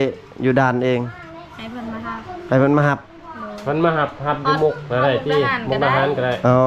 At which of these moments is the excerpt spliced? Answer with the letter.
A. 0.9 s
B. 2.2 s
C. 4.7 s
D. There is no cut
D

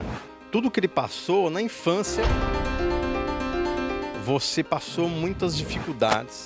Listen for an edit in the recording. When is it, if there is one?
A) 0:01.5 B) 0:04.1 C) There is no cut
B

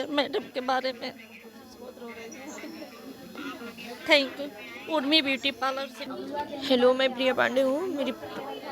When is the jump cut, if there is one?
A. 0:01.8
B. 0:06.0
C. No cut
B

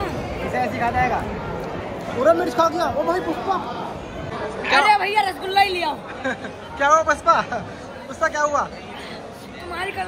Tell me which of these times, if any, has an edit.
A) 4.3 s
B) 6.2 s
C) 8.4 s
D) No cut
A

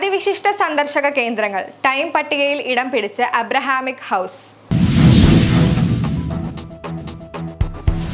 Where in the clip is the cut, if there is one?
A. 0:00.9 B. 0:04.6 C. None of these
B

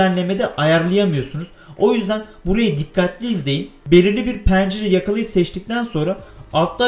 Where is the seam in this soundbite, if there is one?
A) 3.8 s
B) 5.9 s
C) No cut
A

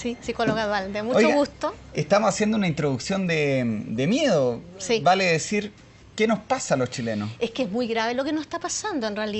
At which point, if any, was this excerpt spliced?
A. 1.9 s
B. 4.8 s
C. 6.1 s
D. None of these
B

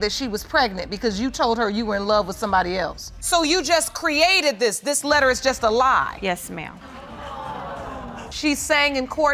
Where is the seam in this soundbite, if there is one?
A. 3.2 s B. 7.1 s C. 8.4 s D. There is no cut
A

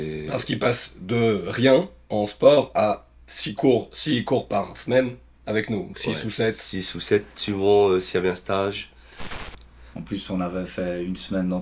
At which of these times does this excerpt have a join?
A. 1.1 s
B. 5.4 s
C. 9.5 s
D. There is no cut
C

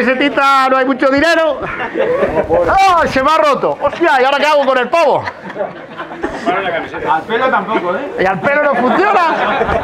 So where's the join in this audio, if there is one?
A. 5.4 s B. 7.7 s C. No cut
C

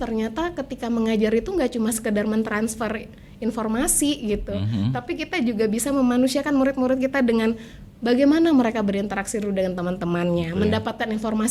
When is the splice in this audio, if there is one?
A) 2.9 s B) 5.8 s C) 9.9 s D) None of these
D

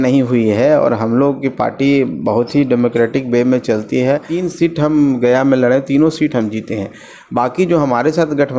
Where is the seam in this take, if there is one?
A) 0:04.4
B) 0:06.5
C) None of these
A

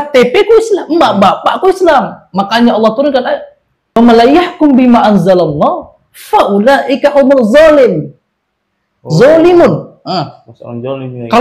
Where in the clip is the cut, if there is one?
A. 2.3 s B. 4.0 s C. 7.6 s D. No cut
B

